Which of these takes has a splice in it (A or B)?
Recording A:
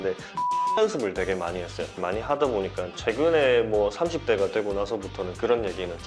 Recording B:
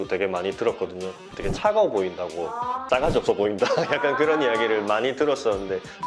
A